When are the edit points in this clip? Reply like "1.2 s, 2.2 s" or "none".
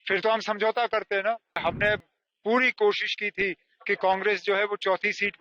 1.6 s